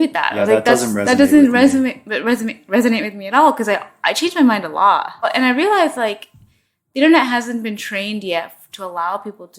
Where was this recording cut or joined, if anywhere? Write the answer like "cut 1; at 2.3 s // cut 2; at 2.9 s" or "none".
cut 1; at 5.3 s